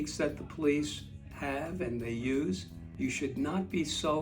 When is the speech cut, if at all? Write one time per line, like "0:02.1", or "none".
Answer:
0:02.7